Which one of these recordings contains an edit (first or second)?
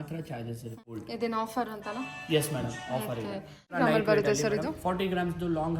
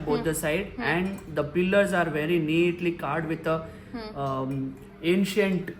first